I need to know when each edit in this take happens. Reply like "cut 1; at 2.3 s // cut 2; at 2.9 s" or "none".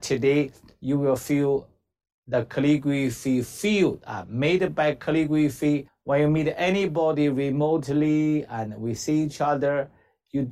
cut 1; at 5.9 s